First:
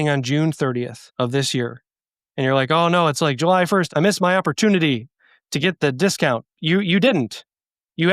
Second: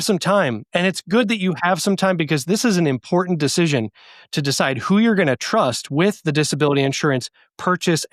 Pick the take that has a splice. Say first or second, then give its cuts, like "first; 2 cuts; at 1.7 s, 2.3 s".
first; 3 cuts; at 1.0 s, 3.9 s, 6.6 s